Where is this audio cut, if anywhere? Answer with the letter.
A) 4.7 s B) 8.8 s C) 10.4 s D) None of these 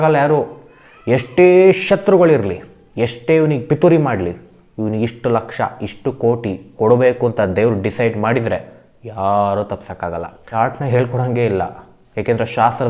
C